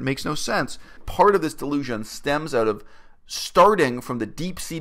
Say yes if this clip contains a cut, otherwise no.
yes